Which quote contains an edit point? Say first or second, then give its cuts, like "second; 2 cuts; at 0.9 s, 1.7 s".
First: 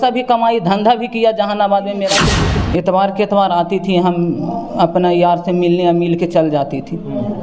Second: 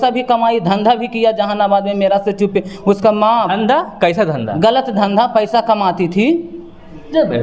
first; 1 cut; at 2.3 s